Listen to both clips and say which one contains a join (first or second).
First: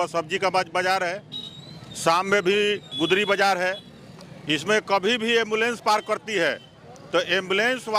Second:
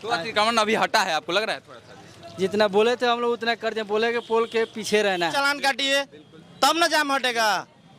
second